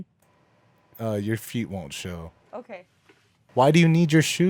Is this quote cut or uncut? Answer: cut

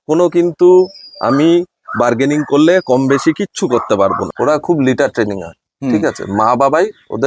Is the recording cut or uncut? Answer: cut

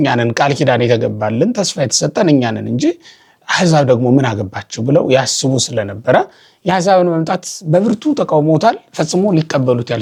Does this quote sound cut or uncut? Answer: uncut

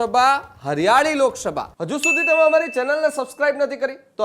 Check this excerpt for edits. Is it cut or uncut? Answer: cut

